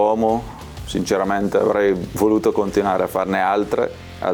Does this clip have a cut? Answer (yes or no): no